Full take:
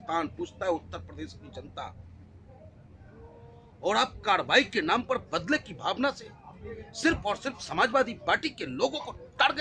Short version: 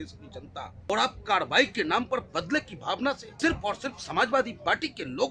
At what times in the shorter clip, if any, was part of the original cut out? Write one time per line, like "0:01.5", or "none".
0:00.9
0:03.3